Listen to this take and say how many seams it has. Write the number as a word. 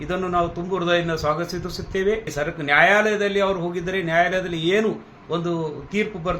one